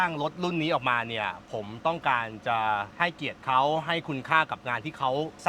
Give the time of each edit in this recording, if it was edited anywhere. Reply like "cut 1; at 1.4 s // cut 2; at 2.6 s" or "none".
cut 1; at 2.9 s